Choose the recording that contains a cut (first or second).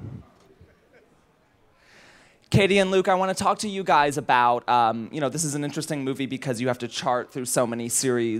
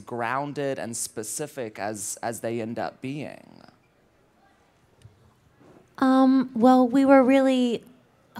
first